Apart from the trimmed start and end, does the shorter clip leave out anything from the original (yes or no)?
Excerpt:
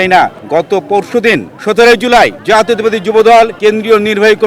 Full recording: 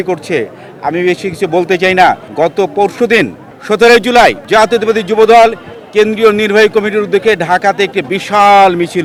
yes